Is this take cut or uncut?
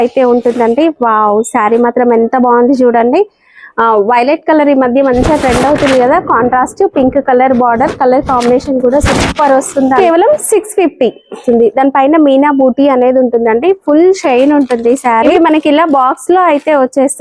cut